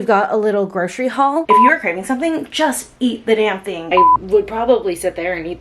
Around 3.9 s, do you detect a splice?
yes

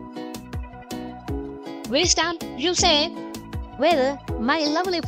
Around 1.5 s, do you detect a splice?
yes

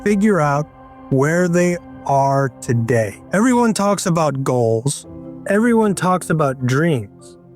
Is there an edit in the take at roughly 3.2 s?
yes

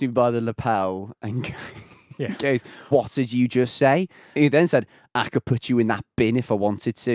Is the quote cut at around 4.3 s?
yes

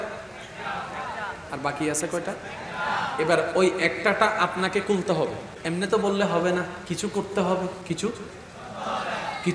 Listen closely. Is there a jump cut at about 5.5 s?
yes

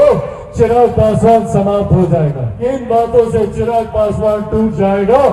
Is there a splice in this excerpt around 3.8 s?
no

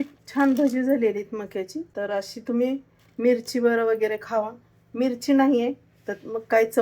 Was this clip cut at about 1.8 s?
yes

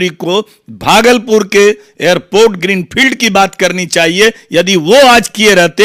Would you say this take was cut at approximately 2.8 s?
no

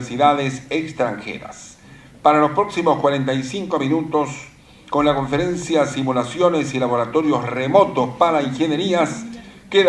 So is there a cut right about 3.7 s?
no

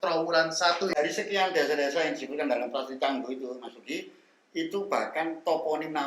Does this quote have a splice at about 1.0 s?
yes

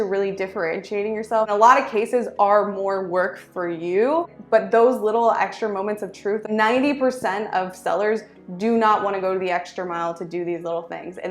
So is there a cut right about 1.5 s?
yes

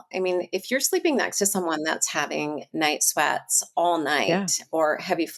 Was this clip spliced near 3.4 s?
no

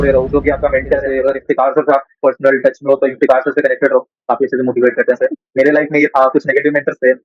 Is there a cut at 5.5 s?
yes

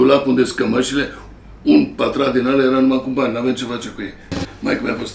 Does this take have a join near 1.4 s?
no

